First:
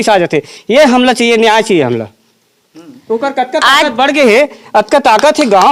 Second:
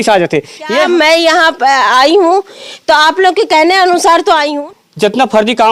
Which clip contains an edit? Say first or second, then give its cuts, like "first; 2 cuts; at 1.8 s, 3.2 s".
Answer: second; 2 cuts; at 0.8 s, 4.5 s